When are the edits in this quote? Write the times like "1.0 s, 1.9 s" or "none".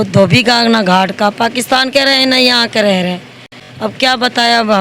none